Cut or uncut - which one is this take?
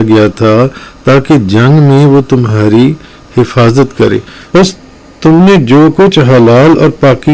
cut